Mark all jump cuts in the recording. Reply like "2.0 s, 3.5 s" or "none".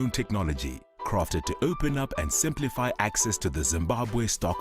3.4 s